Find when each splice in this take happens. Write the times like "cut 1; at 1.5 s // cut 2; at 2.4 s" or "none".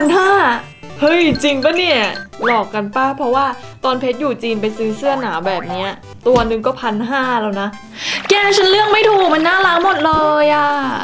cut 1; at 7.8 s